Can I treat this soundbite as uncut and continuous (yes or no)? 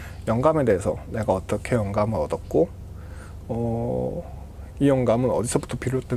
yes